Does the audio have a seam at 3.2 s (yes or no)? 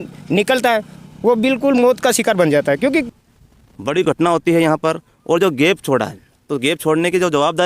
yes